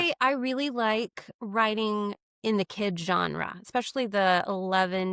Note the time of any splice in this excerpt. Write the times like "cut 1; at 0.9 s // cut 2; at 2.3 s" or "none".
none